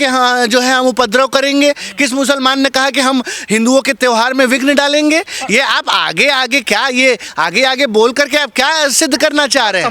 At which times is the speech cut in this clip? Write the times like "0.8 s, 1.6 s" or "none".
none